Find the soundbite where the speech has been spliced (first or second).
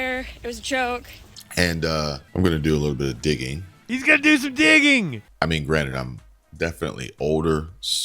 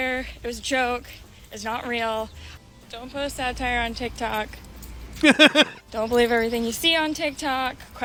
first